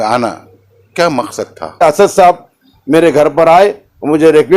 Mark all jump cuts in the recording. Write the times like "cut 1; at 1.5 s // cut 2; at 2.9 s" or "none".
cut 1; at 1.8 s